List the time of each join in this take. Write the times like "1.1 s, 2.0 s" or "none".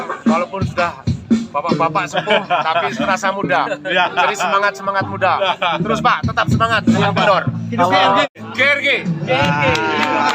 8.3 s

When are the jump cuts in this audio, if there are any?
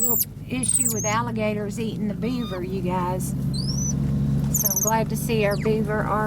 none

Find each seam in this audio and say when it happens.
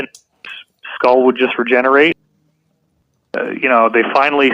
2.2 s

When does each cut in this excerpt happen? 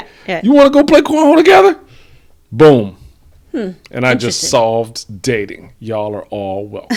none

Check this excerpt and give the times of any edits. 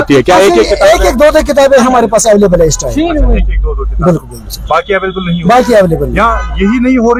none

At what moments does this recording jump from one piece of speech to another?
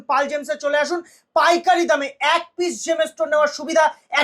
none

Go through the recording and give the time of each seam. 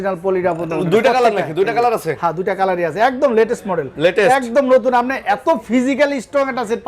none

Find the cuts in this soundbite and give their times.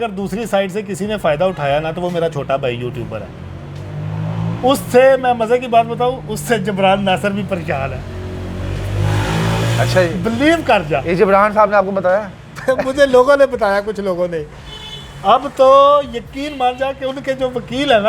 none

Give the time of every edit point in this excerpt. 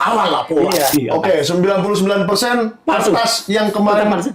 0.9 s

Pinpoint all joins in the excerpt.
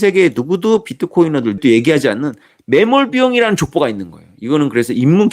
1.6 s

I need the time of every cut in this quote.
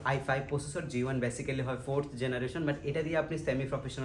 none

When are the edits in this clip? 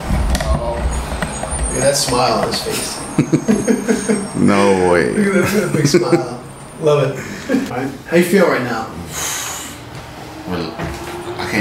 7.7 s

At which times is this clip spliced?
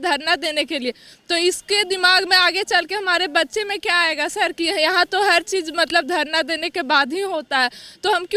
none

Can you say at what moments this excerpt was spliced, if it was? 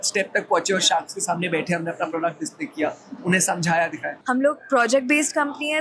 4.1 s

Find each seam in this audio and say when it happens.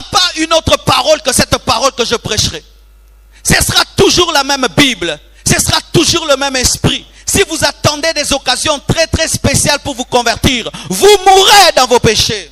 none

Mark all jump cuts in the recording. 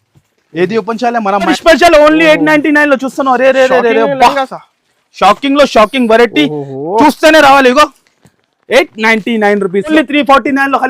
1.5 s, 9.9 s

